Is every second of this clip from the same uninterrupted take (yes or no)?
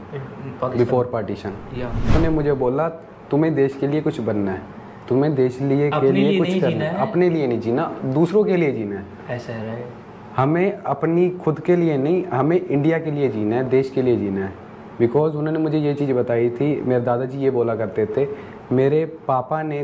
no